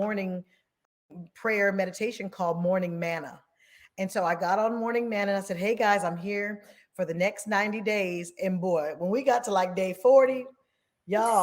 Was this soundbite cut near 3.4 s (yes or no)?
no